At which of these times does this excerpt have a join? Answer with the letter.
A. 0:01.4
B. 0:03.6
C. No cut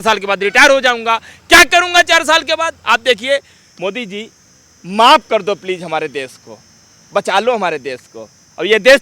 B